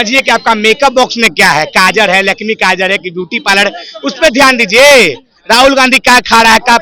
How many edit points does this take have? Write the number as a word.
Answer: zero